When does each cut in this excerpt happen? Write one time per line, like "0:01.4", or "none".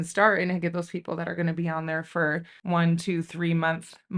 0:02.5